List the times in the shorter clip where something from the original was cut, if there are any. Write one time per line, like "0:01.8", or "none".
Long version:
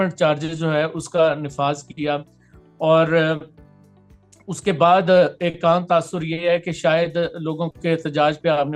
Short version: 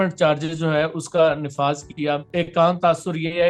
0:02.3